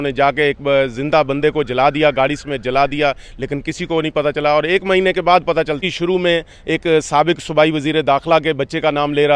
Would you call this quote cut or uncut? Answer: cut